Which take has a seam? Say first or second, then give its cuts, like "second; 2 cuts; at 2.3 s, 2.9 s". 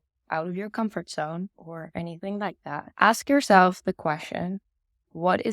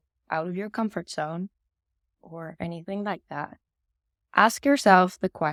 first; 2 cuts; at 1.6 s, 2.9 s